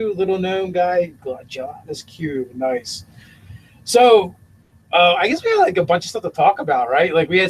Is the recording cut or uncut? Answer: cut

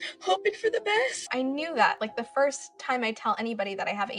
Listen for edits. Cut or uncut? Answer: cut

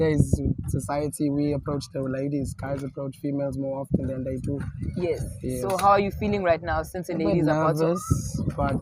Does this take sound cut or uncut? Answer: uncut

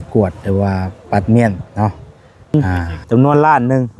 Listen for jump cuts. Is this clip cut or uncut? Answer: cut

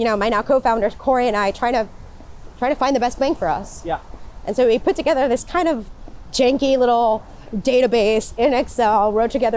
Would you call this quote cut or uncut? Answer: uncut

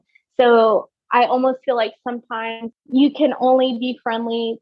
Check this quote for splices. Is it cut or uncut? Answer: cut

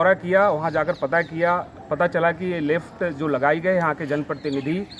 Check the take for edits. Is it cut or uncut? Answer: uncut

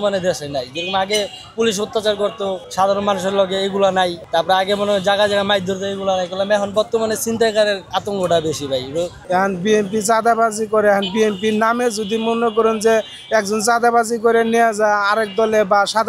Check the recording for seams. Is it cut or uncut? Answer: cut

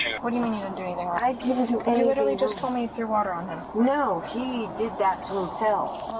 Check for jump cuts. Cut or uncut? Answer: uncut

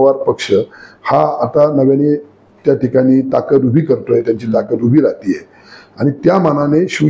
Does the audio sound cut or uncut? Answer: uncut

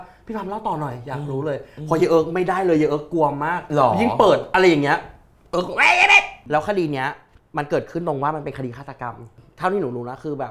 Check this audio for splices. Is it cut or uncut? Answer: cut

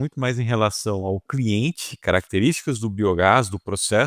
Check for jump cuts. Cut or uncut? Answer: cut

